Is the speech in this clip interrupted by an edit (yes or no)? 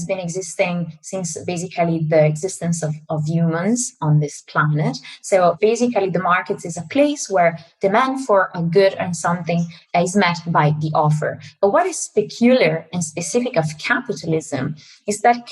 yes